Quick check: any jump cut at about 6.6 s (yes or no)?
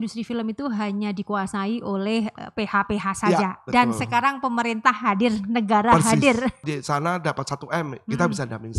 yes